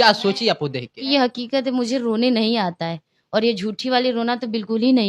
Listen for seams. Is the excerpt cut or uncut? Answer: cut